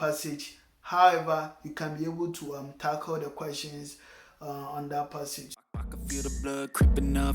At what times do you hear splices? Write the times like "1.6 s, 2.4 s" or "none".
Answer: 5.4 s